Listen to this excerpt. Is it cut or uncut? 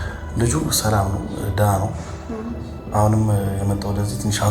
uncut